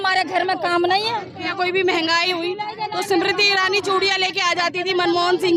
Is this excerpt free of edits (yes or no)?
no